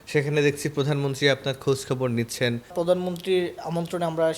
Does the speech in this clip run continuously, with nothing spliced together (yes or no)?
no